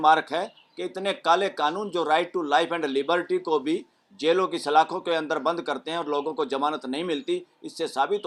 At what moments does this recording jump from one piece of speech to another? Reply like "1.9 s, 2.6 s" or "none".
none